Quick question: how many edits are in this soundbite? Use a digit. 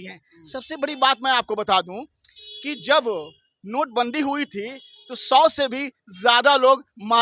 0